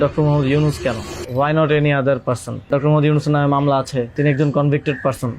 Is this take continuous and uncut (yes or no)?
no